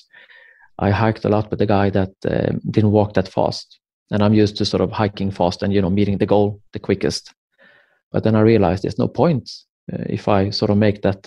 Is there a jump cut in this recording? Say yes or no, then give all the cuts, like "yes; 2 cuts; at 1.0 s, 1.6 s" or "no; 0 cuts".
no; 0 cuts